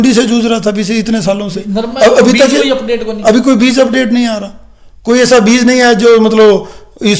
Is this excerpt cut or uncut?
uncut